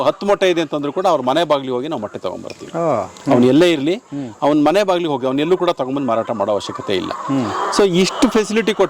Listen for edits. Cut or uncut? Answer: uncut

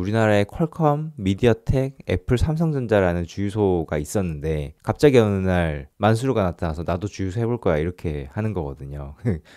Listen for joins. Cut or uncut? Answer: uncut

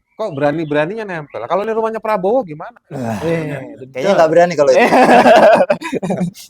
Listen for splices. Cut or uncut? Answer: uncut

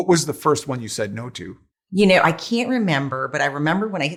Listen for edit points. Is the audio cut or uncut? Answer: uncut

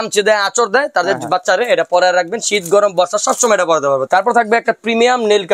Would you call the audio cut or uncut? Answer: cut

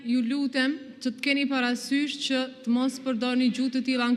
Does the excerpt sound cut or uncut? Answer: uncut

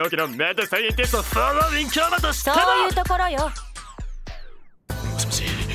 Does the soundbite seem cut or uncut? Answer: cut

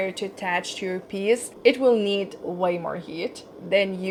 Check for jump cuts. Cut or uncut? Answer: uncut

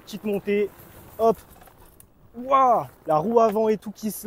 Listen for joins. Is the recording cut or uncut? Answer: cut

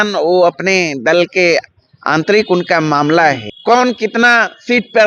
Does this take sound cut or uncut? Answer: cut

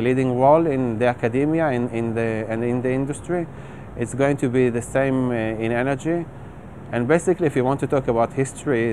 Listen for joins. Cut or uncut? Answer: uncut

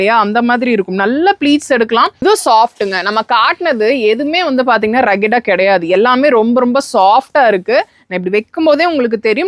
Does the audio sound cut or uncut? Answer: cut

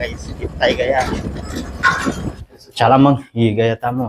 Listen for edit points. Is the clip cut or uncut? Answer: cut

